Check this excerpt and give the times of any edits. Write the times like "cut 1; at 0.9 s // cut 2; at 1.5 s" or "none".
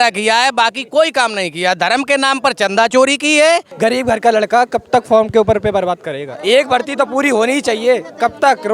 cut 1; at 3.7 s